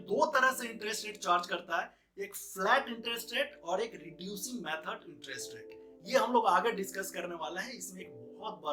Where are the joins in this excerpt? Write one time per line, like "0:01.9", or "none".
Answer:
none